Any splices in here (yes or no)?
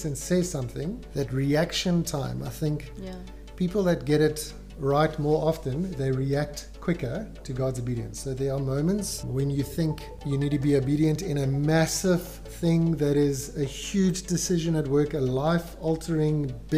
yes